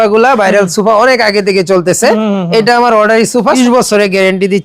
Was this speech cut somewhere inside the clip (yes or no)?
yes